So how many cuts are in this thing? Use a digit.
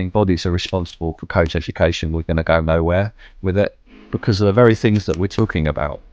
0